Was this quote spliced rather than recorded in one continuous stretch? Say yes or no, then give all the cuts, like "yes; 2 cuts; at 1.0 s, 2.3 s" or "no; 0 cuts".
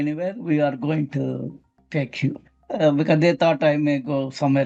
no; 0 cuts